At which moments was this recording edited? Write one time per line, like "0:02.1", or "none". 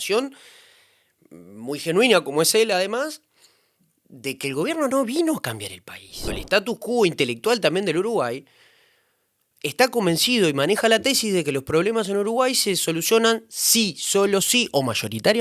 0:06.4